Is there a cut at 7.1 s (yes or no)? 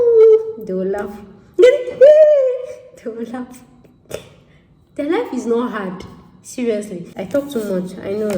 yes